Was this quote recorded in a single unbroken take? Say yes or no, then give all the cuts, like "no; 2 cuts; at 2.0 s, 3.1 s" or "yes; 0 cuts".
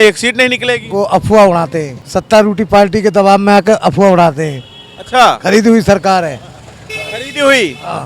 no; 1 cut; at 2.0 s